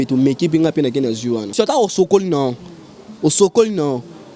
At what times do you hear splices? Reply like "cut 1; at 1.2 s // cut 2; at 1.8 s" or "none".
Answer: cut 1; at 1.5 s